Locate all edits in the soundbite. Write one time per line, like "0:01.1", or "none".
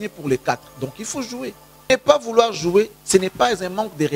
0:01.9